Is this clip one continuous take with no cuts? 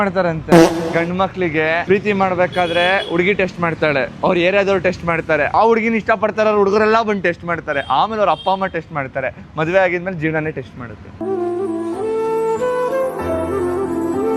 yes; 0 cuts

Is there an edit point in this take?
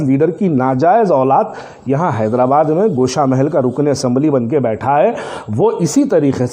no; 0 cuts

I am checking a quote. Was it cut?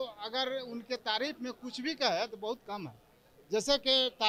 no; 0 cuts

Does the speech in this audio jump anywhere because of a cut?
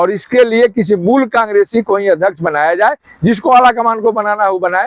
no; 0 cuts

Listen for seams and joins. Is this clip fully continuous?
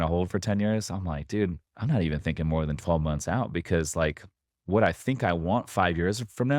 no; 1 cut; at 1.7 s

